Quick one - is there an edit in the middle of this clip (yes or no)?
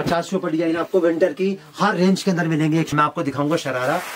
yes